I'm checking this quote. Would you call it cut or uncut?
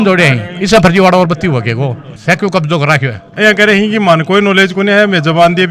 cut